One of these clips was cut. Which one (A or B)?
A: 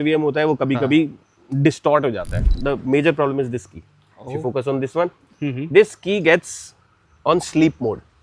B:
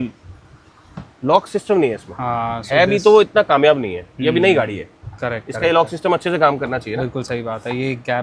A